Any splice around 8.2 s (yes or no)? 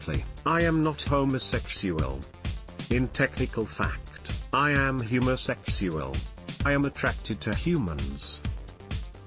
yes